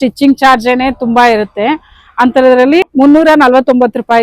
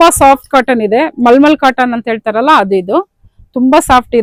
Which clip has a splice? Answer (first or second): first